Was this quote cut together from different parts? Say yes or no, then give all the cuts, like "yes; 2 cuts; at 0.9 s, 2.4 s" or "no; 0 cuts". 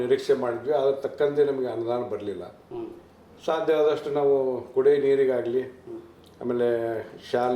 no; 0 cuts